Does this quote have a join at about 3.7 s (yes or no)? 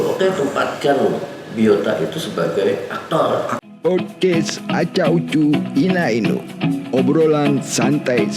yes